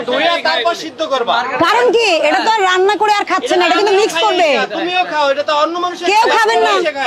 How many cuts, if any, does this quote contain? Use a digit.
0